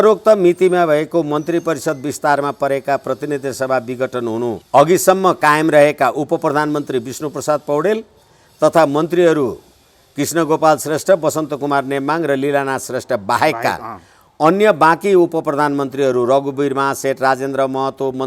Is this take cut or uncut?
cut